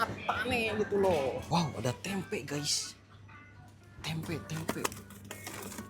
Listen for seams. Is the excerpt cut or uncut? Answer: cut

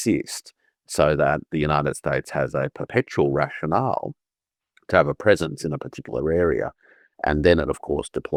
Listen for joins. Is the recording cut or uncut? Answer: uncut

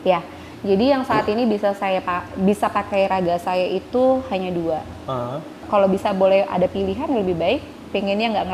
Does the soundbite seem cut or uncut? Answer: cut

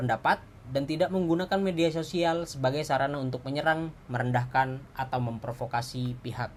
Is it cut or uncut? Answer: uncut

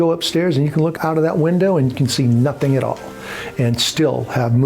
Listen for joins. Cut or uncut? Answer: cut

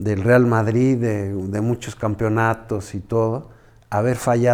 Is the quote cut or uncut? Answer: uncut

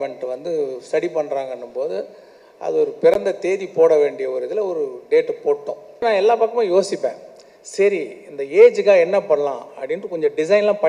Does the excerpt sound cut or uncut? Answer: cut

